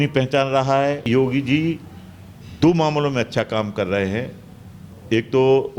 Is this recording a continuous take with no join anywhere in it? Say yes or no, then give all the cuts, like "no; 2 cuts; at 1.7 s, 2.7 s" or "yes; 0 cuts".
no; 1 cut; at 1.1 s